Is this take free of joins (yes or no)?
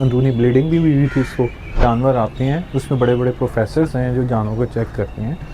no